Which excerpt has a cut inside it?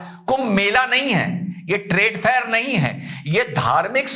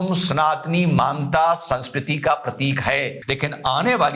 second; 1 cut; at 3.2 s

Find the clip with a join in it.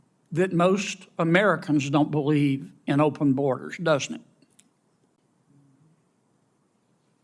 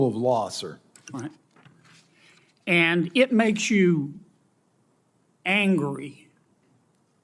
first; 1 cut; at 5.2 s

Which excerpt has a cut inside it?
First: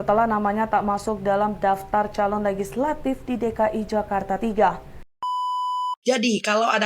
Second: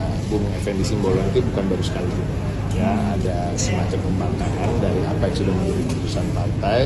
first; 1 cut; at 5.5 s

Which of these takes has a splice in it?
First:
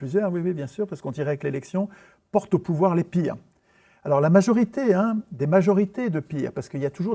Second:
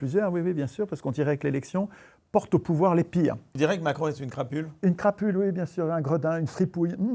second; 1 cut; at 3.5 s

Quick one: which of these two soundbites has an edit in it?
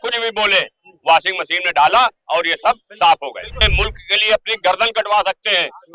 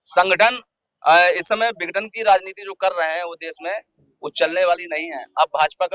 first; 1 cut; at 3.5 s

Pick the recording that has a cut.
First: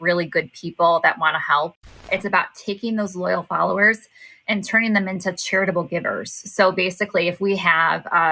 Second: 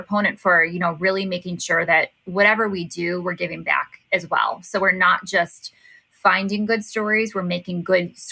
first; 1 cut; at 2.0 s

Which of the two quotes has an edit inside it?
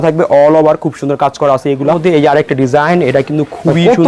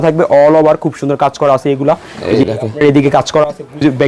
first; 1 cut; at 2.0 s

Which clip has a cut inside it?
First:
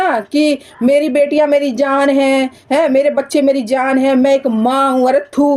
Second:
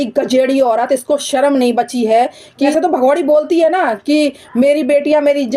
second; 1 cut; at 2.7 s

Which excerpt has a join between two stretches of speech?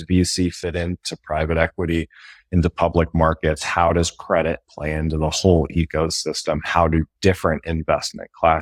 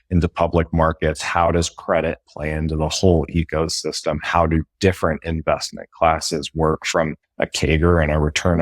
second; 1 cut; at 7.2 s

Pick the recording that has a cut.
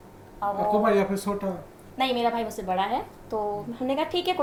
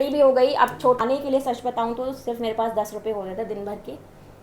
second; 1 cut; at 1.0 s

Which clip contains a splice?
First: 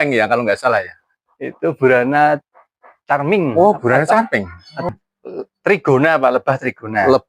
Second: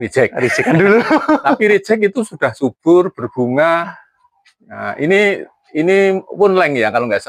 first; 1 cut; at 4.9 s

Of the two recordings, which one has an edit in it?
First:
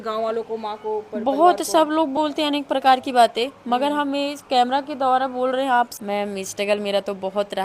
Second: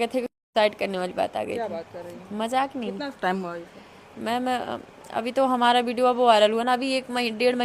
first; 1 cut; at 6.0 s

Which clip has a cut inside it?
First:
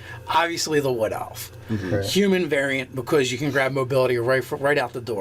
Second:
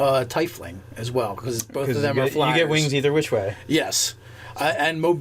second; 1 cut; at 1.7 s

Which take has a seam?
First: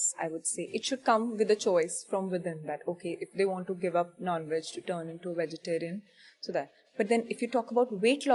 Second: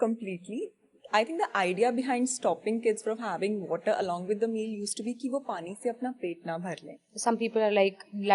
second; 1 cut; at 7.1 s

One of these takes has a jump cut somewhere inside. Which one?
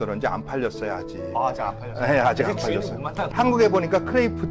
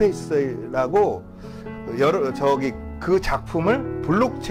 first; 1 cut; at 3.2 s

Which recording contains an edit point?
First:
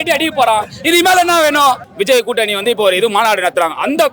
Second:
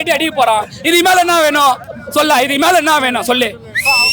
first; 1 cut; at 1.9 s

